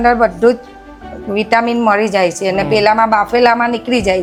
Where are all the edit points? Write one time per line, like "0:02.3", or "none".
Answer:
none